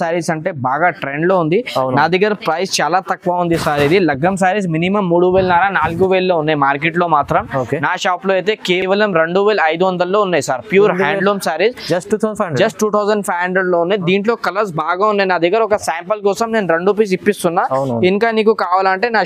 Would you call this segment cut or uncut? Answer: uncut